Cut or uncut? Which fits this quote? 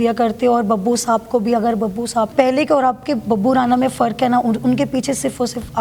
cut